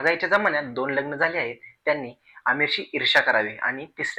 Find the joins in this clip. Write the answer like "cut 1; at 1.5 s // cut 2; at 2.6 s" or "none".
none